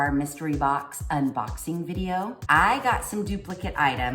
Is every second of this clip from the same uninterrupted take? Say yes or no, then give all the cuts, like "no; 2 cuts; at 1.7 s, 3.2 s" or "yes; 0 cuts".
no; 1 cut; at 2.4 s